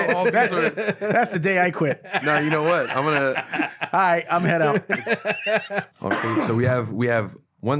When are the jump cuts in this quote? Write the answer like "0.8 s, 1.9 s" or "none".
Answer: 5.9 s